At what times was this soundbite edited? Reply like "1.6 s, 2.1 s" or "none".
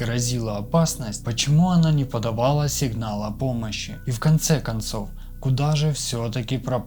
none